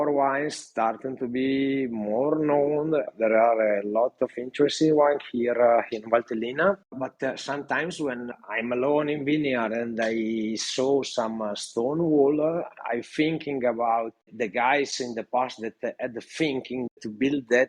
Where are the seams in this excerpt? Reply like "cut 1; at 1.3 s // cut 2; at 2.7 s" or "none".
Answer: cut 1; at 3.1 s // cut 2; at 12.8 s // cut 3; at 16.9 s